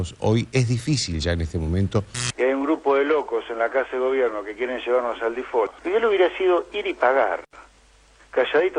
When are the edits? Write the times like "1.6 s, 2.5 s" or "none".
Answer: 2.3 s